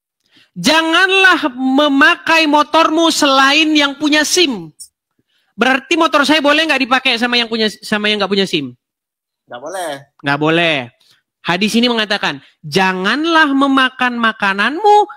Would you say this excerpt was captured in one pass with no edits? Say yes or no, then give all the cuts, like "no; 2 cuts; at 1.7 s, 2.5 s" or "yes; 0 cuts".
yes; 0 cuts